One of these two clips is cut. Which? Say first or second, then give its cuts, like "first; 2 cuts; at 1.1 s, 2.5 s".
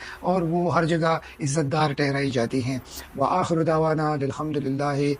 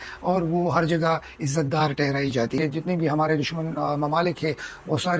second; 1 cut; at 2.6 s